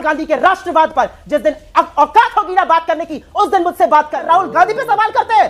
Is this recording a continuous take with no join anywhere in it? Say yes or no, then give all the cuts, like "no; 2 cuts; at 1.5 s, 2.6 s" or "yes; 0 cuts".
no; 1 cut; at 4.2 s